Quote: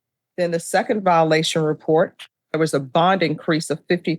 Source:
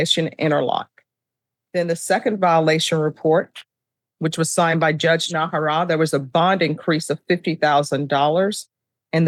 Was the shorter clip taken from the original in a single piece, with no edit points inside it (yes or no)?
no